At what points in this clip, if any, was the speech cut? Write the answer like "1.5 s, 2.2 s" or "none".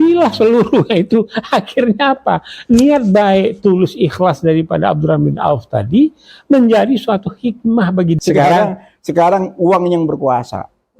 8.2 s